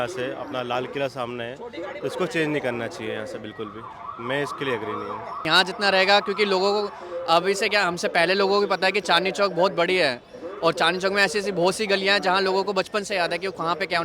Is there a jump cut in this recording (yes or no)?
yes